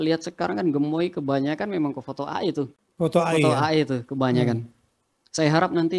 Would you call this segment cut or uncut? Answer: cut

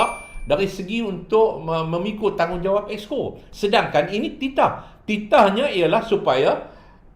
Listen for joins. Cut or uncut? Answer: uncut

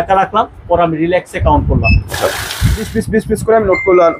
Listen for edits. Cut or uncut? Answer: cut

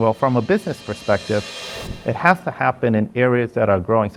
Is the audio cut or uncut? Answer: uncut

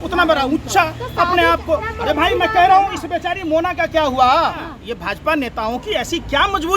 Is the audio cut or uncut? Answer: cut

